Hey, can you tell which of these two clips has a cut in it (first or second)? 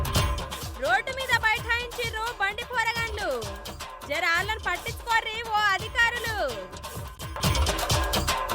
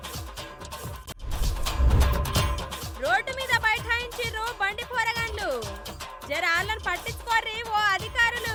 first